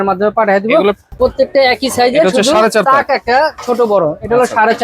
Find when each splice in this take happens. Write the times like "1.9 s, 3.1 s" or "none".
1.1 s